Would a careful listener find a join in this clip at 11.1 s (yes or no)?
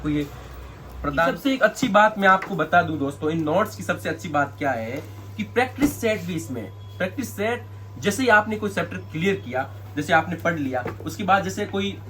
no